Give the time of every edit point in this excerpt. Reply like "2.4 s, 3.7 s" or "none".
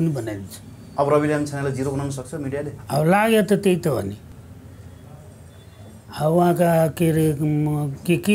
none